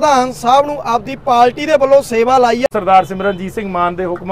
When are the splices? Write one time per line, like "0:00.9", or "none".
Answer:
0:02.7